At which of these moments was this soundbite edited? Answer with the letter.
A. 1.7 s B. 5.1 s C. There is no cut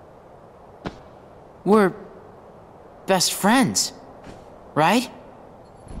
C